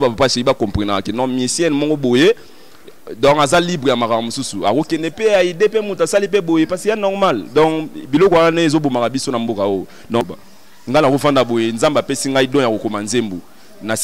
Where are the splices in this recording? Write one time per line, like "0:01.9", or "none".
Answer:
0:10.2